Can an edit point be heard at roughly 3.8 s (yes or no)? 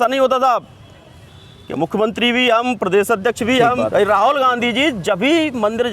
yes